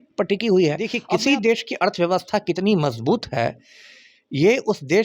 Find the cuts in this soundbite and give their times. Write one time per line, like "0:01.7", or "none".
0:00.9